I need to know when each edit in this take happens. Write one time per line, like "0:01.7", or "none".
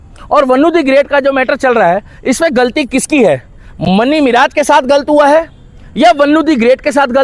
none